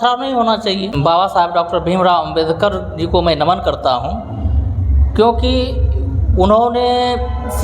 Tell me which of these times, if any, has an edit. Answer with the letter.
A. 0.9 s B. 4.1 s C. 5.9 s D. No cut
A